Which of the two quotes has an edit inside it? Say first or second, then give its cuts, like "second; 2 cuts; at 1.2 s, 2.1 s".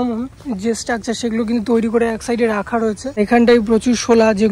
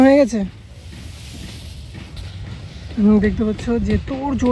first; 1 cut; at 3.2 s